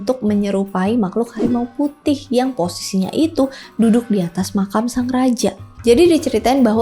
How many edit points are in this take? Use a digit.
1